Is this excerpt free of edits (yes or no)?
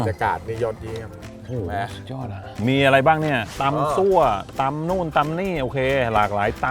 no